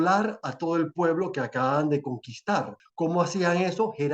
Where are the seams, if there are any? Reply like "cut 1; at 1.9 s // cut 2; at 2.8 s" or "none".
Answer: cut 1; at 2.8 s